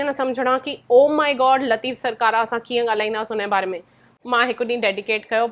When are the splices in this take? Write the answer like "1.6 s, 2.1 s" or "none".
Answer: 4.2 s

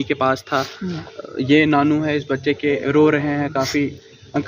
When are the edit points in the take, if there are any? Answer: none

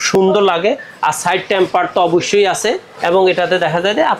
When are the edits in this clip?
none

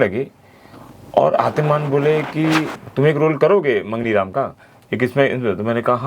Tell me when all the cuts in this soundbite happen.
2.8 s

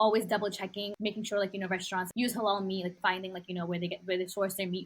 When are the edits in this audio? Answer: 0.9 s, 2.1 s, 2.9 s

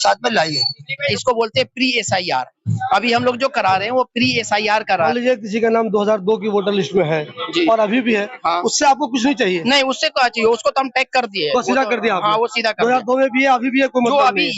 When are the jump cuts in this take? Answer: 1.0 s, 5.0 s

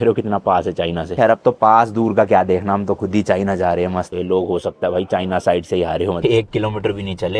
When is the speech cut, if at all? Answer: 4.1 s, 6.2 s

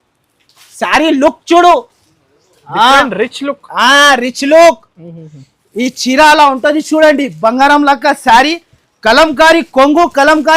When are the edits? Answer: none

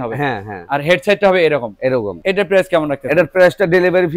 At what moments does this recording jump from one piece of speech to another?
none

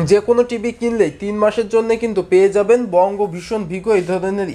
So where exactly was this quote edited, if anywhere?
none

